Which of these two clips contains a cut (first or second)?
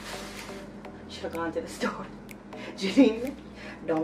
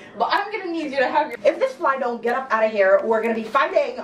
second